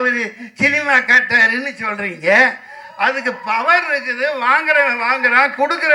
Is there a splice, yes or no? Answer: no